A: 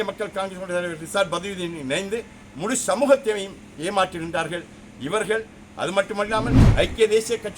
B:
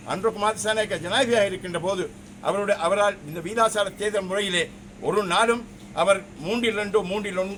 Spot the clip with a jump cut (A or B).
A